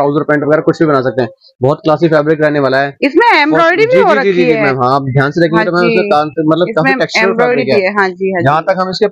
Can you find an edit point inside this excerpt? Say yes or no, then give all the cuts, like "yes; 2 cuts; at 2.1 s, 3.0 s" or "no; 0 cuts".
no; 0 cuts